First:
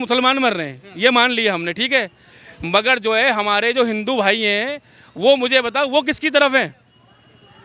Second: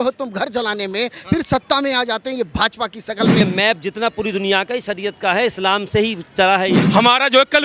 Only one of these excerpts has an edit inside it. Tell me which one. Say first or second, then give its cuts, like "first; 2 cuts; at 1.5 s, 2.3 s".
second; 2 cuts; at 3.4 s, 6.9 s